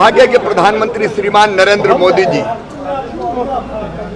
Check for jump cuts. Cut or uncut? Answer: uncut